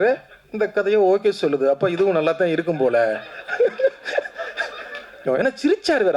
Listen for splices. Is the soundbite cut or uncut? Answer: cut